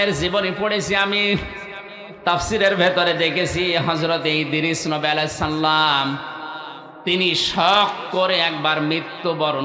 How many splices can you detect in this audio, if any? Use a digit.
0